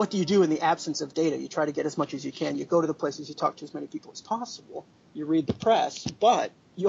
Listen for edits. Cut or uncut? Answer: uncut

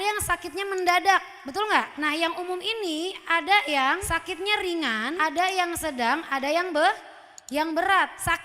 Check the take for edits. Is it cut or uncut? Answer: cut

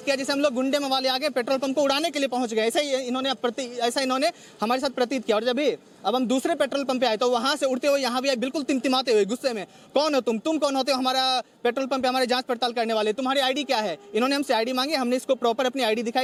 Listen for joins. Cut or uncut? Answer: uncut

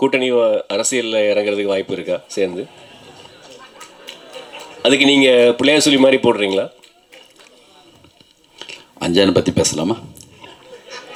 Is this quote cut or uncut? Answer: uncut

